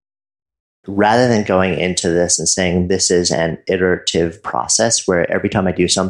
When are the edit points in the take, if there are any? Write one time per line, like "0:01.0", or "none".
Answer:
0:00.9

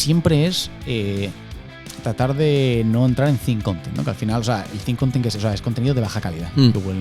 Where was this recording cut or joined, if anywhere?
none

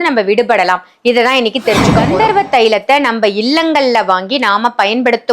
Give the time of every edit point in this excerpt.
0:01.9

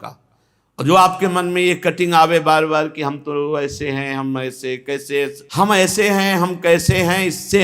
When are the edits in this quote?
0:05.4

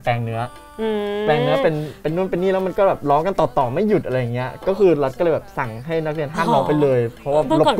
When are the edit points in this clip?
none

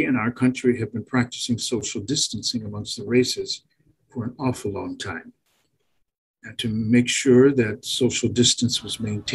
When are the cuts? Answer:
none

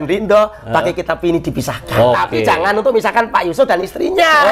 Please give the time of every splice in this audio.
0:02.3

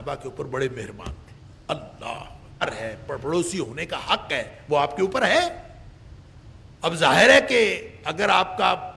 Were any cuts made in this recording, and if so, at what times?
0:02.6

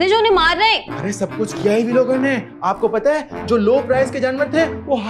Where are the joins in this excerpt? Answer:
none

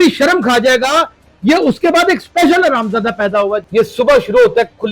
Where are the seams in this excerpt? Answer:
0:03.6

